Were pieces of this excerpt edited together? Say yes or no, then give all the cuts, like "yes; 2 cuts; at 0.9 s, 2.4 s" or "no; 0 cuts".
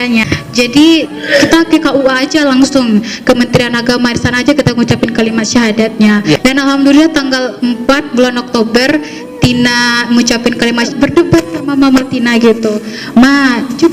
yes; 2 cuts; at 1.1 s, 10.9 s